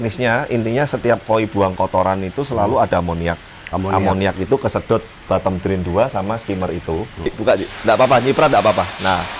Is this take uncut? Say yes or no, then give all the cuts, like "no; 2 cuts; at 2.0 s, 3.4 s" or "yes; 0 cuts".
no; 1 cut; at 7.3 s